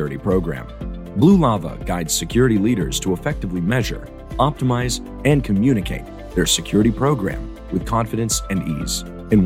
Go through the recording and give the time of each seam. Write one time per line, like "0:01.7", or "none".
none

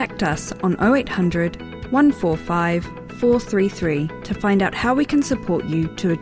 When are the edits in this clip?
none

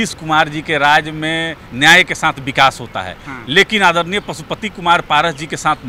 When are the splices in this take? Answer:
none

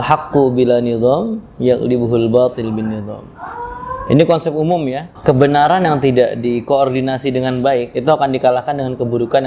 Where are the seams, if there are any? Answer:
0:05.1
0:07.9

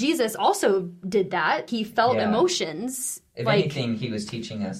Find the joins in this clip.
0:01.7

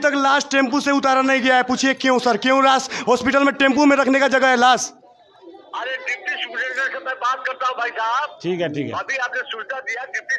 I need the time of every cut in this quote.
none

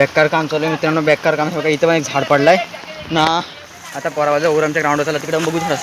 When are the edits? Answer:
none

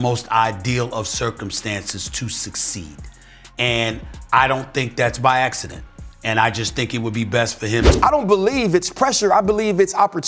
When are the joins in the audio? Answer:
0:07.9

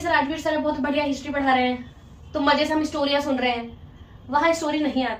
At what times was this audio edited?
none

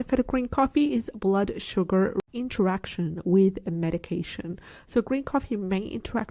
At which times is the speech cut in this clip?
0:02.2

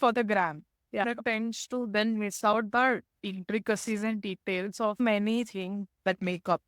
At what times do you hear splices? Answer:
0:01.0
0:05.0

